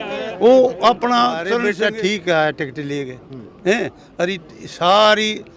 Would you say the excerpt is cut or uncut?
cut